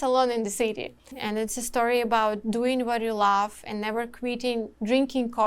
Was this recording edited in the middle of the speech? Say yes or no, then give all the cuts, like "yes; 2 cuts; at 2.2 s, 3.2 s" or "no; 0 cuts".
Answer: yes; 1 cut; at 1.2 s